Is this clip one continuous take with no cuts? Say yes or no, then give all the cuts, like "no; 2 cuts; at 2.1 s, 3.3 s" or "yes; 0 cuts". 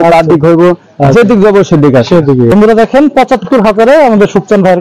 no; 1 cut; at 2.5 s